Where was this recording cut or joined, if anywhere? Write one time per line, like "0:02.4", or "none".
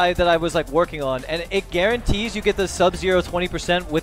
0:01.4